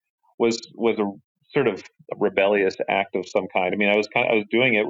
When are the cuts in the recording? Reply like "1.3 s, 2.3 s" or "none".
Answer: none